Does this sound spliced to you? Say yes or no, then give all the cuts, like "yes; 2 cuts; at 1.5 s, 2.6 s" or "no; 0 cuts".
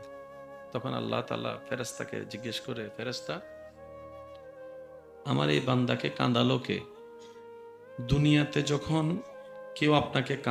no; 0 cuts